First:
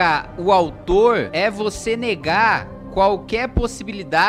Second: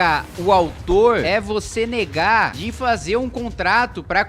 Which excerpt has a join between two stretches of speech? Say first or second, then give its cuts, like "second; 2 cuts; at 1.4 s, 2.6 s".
second; 2 cuts; at 1.2 s, 2.6 s